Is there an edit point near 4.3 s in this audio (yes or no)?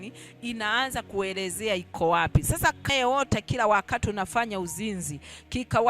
no